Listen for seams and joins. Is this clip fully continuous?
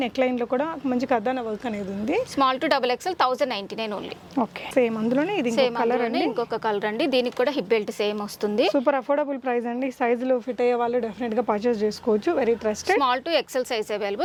yes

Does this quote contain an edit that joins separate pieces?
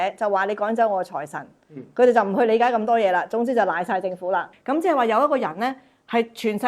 yes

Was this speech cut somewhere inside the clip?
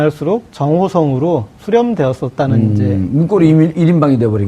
yes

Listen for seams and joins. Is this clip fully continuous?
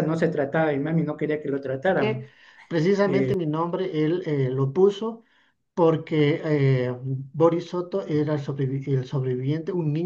no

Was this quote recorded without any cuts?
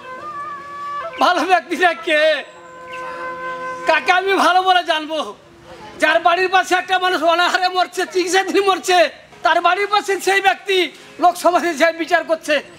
no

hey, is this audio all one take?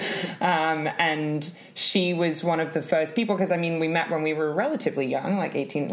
yes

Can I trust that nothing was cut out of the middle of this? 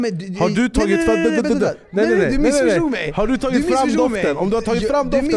yes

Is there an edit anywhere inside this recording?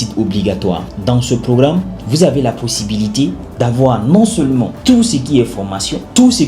no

